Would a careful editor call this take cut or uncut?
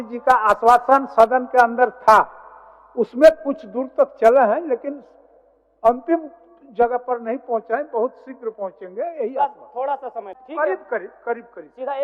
cut